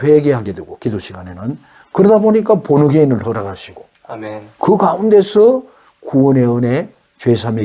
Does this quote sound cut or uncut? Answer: uncut